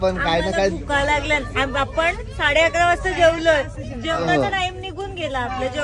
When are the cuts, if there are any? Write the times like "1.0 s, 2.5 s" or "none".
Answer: none